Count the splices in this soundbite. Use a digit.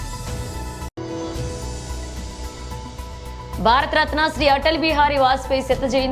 0